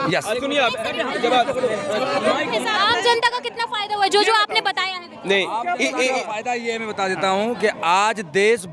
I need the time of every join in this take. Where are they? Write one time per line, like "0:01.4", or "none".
0:02.7